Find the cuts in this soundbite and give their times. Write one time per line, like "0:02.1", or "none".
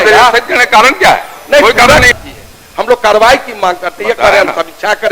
0:02.2